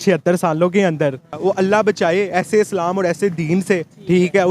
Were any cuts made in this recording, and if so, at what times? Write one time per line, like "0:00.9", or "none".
0:01.4